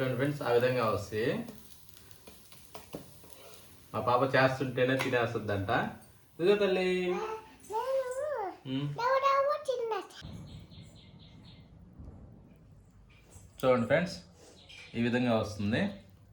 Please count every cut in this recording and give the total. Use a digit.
1